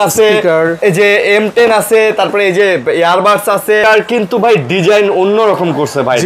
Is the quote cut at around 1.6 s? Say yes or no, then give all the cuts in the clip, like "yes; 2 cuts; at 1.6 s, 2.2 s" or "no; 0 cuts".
no; 1 cut; at 3.8 s